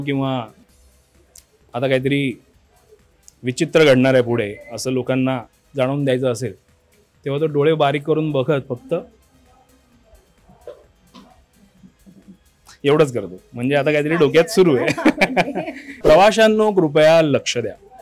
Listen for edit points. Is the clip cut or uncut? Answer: cut